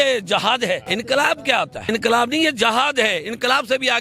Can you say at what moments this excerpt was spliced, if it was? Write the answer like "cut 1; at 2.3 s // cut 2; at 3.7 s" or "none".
cut 1; at 0.8 s // cut 2; at 1.8 s